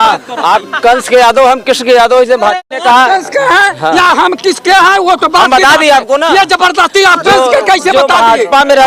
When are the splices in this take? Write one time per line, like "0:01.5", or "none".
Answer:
0:02.6